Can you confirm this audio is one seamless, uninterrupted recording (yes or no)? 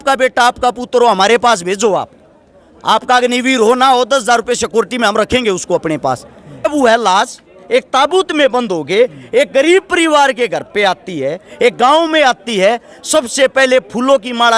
no